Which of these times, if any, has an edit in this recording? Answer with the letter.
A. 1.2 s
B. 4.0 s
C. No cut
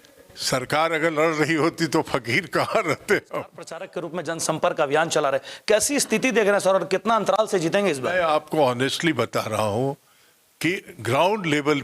B